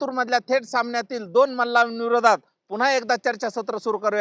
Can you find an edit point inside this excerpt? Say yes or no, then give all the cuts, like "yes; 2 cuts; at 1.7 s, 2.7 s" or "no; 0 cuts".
no; 0 cuts